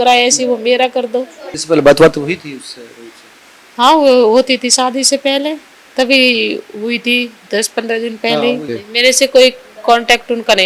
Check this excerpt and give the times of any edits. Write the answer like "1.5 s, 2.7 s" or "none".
1.5 s, 8.8 s